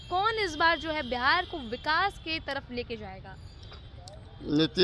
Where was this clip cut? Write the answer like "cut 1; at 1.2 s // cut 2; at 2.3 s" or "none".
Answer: none